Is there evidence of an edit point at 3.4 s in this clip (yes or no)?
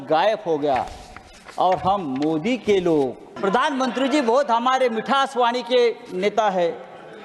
yes